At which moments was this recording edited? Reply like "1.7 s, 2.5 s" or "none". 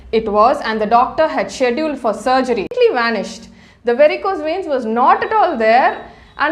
2.7 s